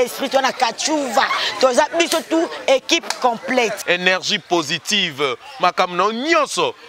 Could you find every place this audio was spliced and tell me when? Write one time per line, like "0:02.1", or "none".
none